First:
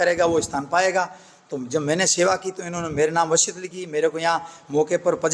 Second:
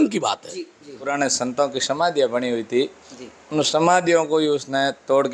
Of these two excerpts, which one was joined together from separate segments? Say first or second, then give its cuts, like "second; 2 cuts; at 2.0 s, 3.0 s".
second; 1 cut; at 1.1 s